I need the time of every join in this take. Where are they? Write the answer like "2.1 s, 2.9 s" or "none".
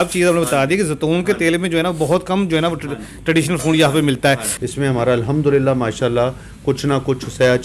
4.6 s